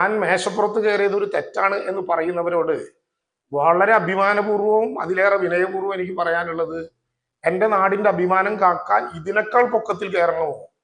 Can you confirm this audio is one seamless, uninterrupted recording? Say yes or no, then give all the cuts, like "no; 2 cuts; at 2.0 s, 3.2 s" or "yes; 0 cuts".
yes; 0 cuts